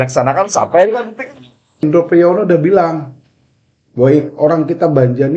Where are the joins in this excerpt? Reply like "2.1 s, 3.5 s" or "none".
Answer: 1.8 s